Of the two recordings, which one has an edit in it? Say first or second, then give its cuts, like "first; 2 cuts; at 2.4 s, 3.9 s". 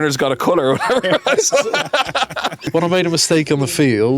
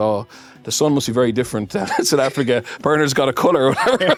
first; 1 cut; at 2.6 s